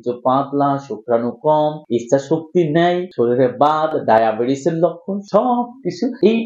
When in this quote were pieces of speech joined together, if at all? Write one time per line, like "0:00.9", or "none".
none